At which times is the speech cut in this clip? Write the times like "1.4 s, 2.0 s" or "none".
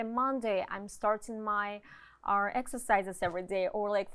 none